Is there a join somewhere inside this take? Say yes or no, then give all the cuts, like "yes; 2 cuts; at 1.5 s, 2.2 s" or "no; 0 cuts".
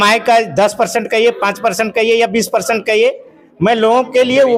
no; 0 cuts